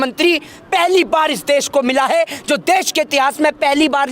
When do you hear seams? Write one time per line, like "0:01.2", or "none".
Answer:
none

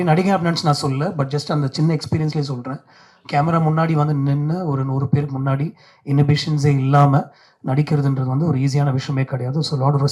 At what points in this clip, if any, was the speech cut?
none

